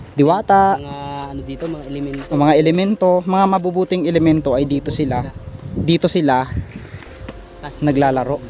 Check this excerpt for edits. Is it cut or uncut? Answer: uncut